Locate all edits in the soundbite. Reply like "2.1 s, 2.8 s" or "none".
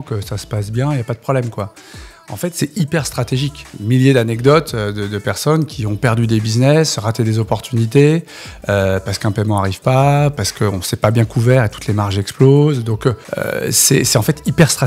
3.7 s, 10.3 s, 13.2 s